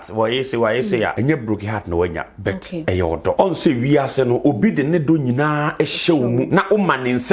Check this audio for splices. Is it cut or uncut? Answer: cut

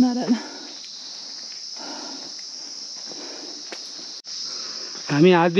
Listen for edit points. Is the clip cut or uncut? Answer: cut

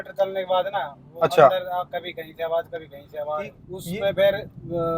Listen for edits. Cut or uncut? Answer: cut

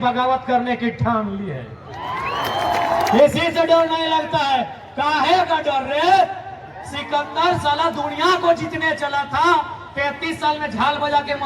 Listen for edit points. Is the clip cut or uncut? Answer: cut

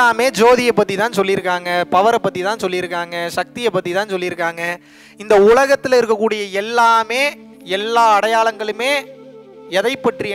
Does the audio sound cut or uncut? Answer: uncut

